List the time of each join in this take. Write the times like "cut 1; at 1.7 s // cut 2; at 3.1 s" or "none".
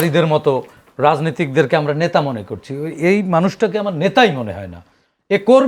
none